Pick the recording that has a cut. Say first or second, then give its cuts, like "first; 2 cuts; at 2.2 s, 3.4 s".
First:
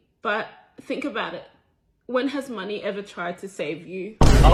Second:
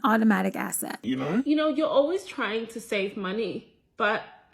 second; 1 cut; at 1.0 s